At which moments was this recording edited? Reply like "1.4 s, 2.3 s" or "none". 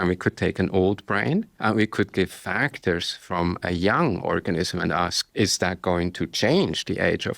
1.5 s, 5.2 s